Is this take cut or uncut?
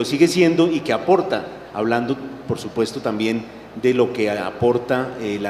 uncut